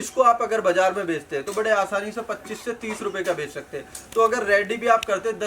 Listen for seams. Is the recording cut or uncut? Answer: uncut